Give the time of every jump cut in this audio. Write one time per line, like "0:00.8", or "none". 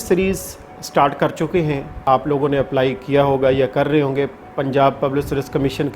0:02.0